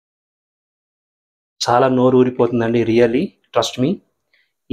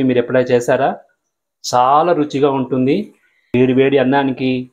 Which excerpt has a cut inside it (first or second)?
second